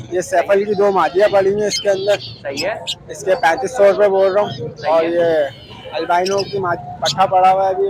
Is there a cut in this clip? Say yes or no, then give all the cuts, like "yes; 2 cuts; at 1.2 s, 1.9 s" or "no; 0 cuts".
no; 0 cuts